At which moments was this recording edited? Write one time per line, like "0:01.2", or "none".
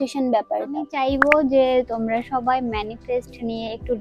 0:00.9